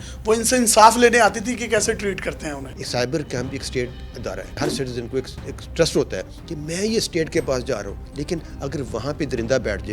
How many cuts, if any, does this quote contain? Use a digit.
1